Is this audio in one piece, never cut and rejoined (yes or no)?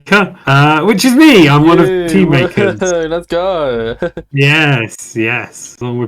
yes